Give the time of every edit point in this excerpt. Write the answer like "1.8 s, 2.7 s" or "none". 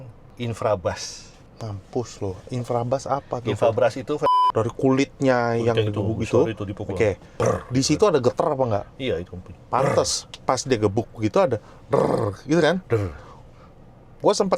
4.3 s